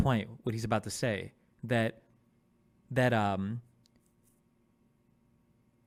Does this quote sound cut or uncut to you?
uncut